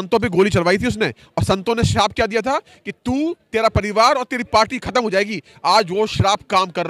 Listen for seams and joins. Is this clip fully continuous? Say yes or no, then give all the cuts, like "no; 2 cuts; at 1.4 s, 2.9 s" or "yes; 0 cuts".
yes; 0 cuts